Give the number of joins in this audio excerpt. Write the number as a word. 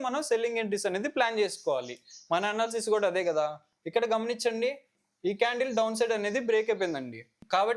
zero